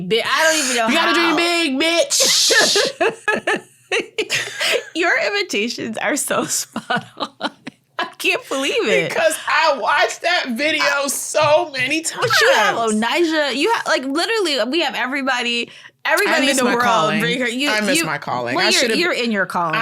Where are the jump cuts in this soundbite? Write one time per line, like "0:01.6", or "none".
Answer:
0:03.4